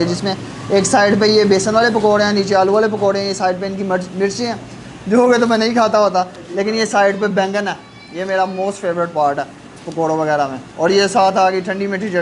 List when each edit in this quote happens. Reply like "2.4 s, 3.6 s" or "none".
none